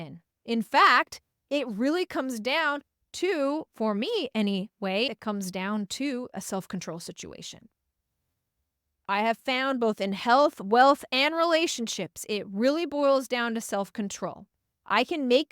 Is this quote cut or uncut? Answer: cut